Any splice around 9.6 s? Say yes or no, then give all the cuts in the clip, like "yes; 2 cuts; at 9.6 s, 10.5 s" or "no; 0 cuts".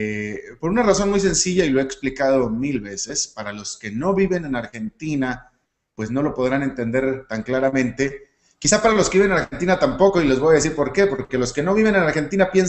yes; 1 cut; at 9.6 s